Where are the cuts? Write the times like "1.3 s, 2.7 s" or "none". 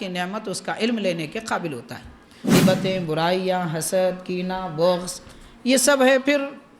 2.5 s